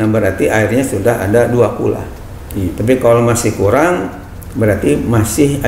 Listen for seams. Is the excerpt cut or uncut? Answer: uncut